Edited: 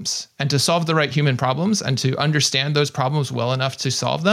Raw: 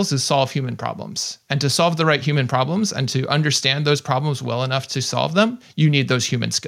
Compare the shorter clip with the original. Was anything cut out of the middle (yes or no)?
no